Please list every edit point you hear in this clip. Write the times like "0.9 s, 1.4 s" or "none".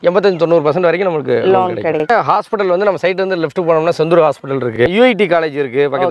2.1 s, 4.8 s